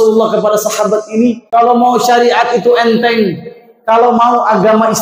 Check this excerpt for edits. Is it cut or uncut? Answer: cut